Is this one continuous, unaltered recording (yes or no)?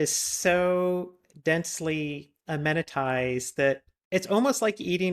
yes